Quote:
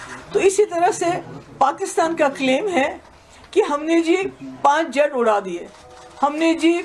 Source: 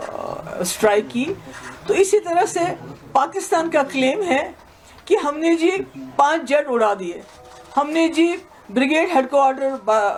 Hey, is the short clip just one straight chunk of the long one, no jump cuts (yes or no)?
yes